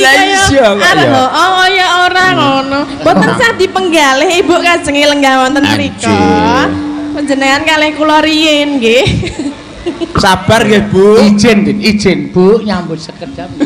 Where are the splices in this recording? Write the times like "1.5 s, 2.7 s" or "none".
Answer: none